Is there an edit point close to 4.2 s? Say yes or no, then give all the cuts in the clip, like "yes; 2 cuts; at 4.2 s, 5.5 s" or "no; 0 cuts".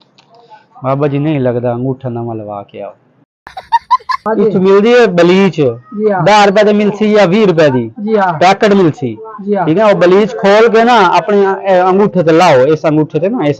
yes; 1 cut; at 4.2 s